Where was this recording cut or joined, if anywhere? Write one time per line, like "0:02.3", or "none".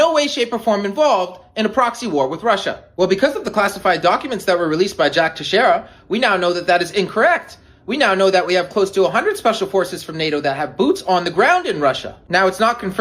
0:02.8
0:05.9
0:12.1